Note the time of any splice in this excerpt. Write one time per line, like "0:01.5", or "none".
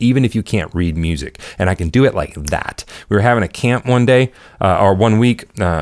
none

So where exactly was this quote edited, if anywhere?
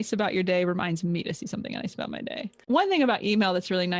0:02.6

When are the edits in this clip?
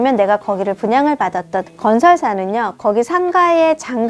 0:01.7

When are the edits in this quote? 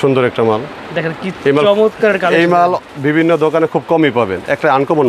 none

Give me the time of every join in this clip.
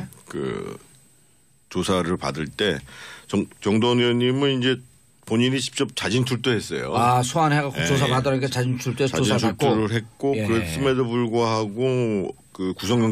none

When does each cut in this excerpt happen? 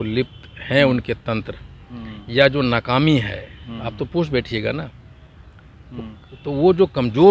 none

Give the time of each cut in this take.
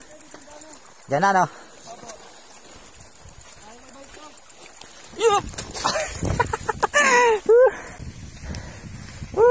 0:08.0

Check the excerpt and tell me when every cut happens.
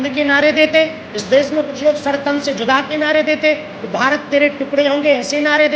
none

